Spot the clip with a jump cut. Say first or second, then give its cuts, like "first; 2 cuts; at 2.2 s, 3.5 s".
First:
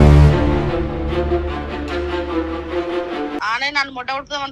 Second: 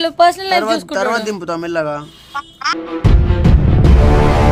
first; 1 cut; at 3.4 s